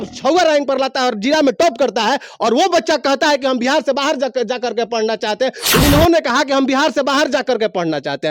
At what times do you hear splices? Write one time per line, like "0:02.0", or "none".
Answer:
0:05.8